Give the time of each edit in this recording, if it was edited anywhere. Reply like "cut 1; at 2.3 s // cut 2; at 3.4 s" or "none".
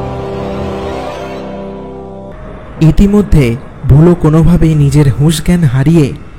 cut 1; at 2.3 s